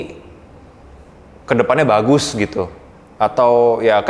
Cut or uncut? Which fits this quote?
uncut